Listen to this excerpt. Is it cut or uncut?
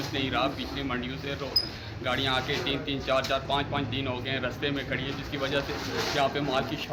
uncut